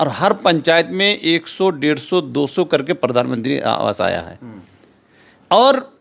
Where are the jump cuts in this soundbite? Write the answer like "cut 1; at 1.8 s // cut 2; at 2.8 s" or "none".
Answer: none